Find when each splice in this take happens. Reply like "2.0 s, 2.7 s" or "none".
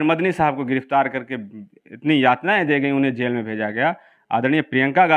none